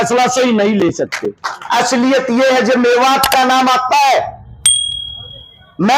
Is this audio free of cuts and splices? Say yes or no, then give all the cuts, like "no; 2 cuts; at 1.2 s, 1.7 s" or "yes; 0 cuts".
no; 1 cut; at 1.5 s